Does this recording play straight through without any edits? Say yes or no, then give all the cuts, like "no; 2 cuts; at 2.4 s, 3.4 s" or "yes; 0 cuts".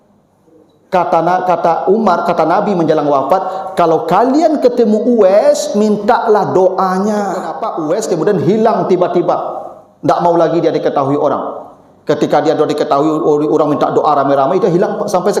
no; 1 cut; at 7.6 s